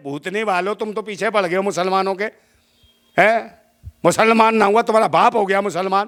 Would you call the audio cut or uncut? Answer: uncut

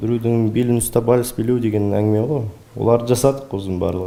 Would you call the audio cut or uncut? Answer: uncut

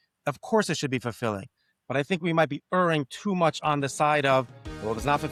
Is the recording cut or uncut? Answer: uncut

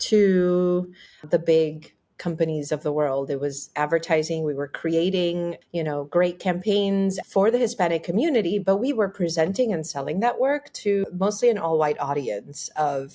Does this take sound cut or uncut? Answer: cut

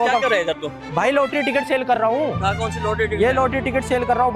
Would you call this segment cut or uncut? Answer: uncut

